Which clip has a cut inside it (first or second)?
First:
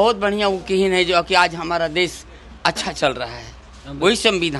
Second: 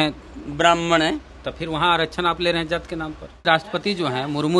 second